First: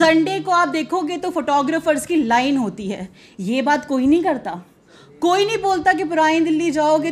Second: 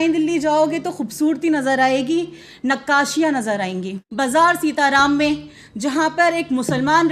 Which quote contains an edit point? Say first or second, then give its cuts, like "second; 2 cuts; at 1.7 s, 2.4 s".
second; 1 cut; at 4.0 s